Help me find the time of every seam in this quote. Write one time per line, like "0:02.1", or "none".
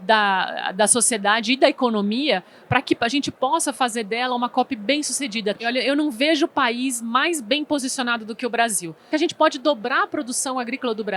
0:05.6
0:09.1